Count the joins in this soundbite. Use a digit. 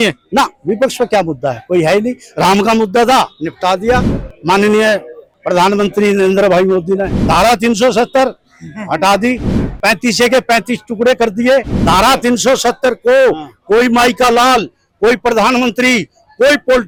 0